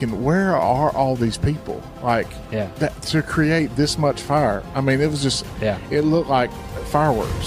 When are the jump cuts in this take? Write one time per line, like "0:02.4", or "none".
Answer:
none